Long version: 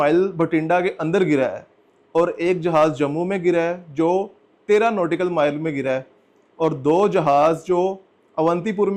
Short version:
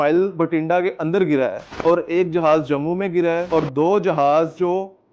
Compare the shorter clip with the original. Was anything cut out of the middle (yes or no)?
yes